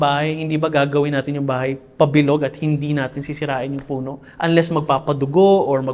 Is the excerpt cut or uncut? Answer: uncut